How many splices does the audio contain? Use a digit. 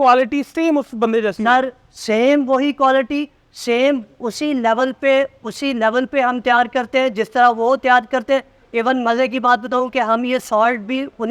0